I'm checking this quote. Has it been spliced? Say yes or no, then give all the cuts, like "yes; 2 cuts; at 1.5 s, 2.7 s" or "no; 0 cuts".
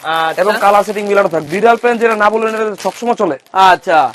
yes; 1 cut; at 1.4 s